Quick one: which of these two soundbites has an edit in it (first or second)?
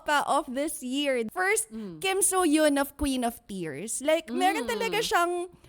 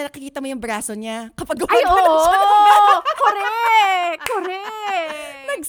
first